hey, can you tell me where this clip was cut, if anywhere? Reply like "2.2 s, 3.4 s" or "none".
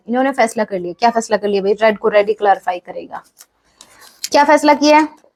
none